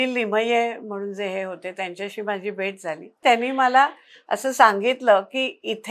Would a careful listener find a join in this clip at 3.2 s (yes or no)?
yes